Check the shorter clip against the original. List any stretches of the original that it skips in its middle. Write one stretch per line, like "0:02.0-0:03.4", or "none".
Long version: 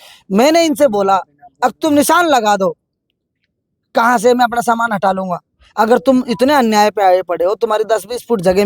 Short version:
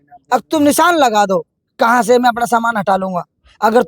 0:02.9-0:03.7